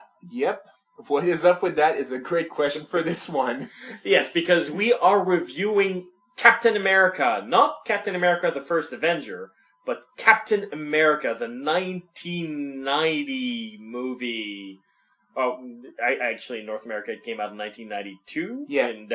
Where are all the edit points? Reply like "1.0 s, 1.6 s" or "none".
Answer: 7.3 s